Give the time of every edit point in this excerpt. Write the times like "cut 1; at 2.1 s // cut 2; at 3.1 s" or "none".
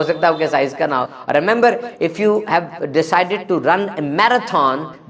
none